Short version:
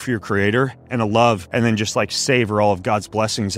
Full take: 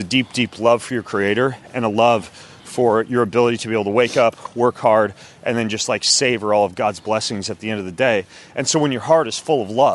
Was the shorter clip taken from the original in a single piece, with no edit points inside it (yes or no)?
no